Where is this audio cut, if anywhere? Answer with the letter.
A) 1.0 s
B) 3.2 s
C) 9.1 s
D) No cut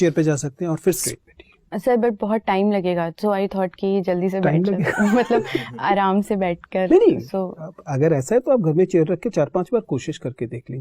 A